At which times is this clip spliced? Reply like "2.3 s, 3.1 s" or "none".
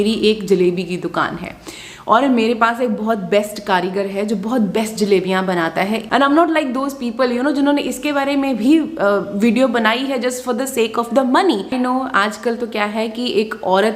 6.0 s, 11.7 s